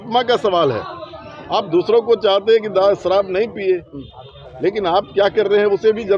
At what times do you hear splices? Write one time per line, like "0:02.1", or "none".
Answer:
none